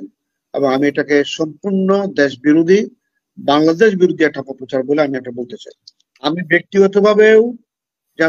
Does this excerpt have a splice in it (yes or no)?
yes